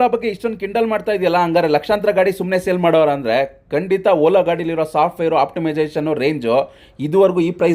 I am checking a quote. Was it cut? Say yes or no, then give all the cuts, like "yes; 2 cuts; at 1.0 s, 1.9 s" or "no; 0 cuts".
no; 0 cuts